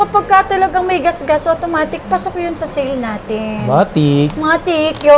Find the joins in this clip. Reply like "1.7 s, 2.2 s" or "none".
none